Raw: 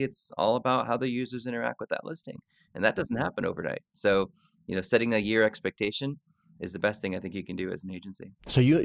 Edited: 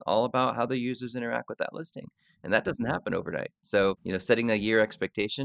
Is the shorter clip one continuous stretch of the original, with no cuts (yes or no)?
no